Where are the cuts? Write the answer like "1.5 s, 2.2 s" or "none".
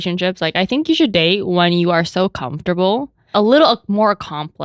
3.3 s